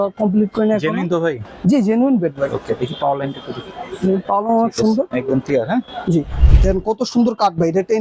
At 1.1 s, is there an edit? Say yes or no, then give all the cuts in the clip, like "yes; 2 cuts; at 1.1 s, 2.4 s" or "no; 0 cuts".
no; 1 cut; at 6.4 s